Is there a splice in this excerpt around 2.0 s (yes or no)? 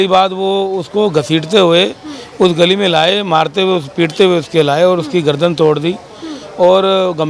no